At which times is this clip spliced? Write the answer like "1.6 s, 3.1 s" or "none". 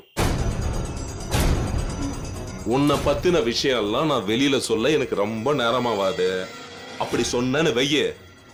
none